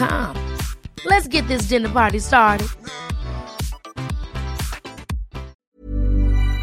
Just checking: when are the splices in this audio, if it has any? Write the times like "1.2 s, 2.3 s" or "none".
5.6 s